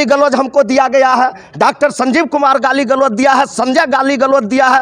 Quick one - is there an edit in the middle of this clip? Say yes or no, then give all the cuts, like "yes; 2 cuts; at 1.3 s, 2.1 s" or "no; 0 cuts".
no; 0 cuts